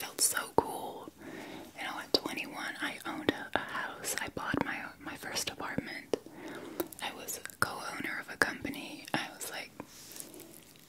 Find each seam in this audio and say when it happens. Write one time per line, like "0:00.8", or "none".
none